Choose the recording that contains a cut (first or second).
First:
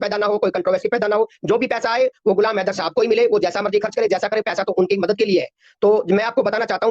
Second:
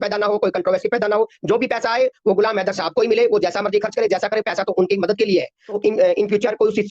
second